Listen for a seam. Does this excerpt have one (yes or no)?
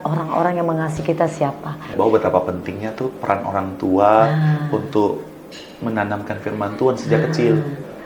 yes